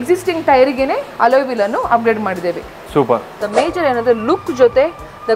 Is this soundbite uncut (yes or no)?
no